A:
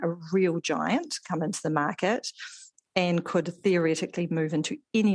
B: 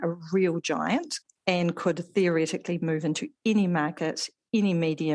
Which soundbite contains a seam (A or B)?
B